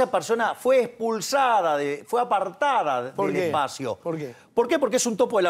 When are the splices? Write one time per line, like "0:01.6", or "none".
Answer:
none